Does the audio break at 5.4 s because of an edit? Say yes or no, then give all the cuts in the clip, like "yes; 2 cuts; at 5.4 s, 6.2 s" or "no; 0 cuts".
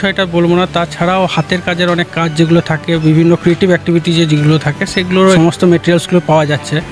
yes; 1 cut; at 5.4 s